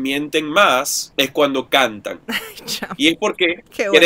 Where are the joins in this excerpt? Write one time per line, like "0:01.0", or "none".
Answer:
none

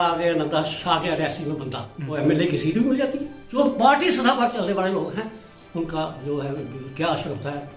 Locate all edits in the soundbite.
0:02.1
0:03.6

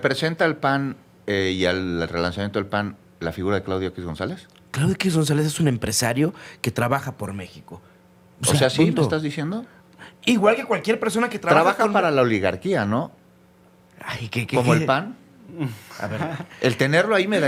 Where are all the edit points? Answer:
none

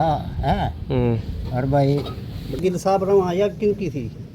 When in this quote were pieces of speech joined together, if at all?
0:02.6

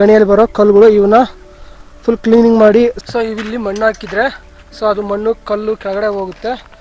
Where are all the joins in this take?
0:03.0

